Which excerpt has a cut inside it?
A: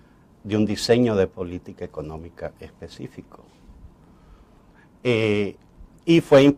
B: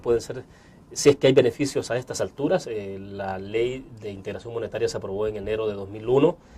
B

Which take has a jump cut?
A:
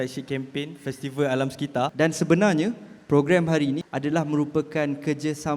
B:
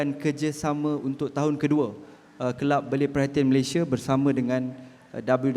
A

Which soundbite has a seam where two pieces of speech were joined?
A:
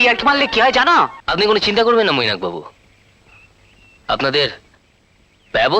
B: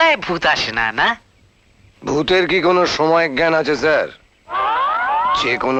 A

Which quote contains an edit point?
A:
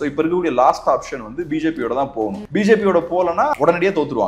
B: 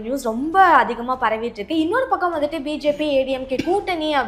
A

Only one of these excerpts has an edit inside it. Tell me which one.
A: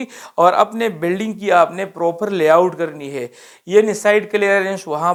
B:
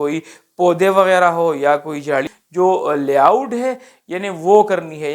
B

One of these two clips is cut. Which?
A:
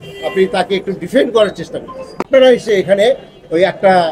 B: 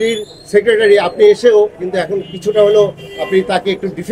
A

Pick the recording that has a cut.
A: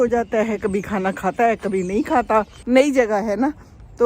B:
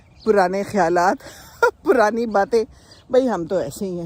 A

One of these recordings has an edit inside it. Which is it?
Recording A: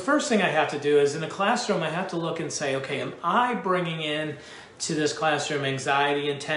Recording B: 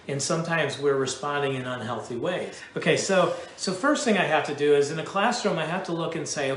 B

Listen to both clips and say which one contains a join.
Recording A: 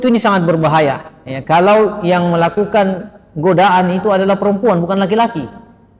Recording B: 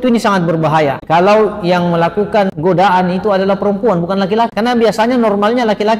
B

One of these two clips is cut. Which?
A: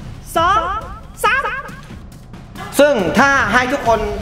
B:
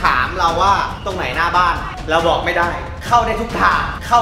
A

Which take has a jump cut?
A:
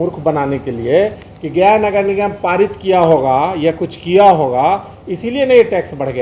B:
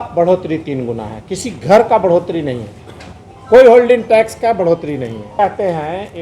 B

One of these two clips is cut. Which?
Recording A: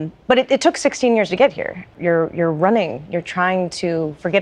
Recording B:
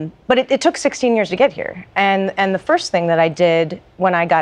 A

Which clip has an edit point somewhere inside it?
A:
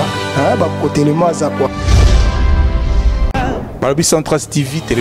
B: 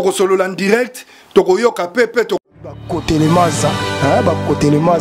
B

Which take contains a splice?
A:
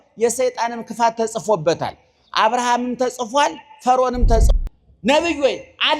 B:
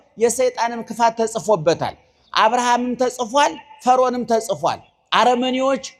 A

